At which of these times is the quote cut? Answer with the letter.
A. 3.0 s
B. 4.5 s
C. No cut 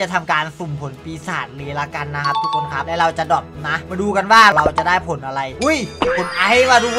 B